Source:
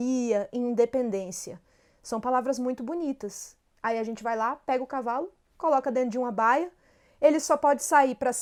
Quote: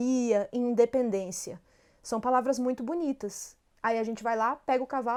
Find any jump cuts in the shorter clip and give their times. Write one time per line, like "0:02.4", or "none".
none